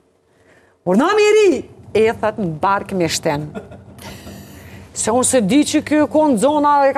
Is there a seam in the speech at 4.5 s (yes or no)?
no